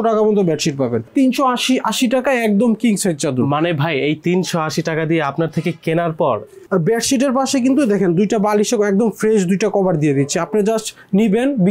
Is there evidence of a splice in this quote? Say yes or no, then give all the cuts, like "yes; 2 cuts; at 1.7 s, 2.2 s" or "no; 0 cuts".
yes; 2 cuts; at 1.0 s, 6.6 s